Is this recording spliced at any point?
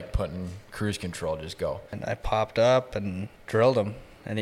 yes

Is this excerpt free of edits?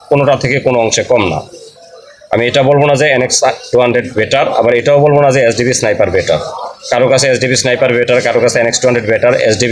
yes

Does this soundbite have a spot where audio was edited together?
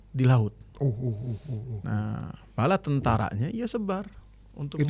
no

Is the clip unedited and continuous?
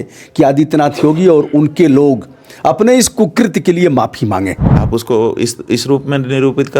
no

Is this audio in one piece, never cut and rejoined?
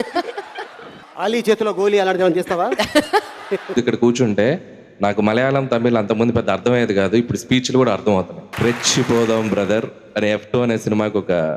no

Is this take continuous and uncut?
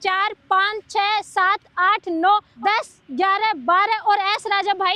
no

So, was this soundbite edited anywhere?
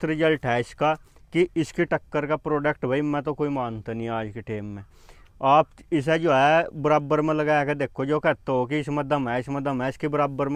no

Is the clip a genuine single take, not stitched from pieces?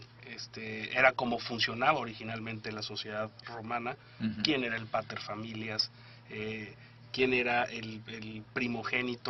yes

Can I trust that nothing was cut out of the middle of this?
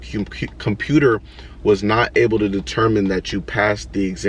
yes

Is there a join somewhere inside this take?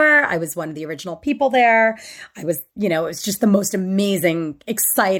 no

